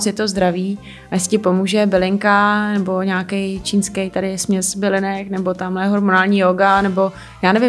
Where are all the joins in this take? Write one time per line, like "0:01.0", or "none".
none